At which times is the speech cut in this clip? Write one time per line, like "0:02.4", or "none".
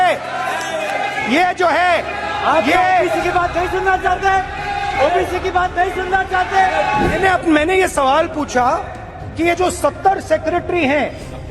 0:07.2